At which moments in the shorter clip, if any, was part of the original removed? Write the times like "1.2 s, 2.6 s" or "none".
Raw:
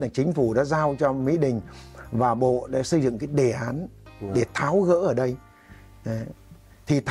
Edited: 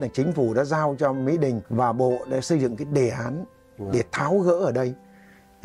1.6 s